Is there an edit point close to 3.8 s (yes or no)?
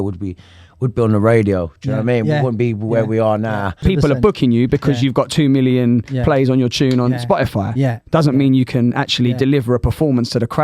yes